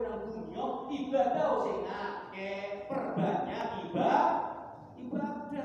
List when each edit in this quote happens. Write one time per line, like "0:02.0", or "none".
none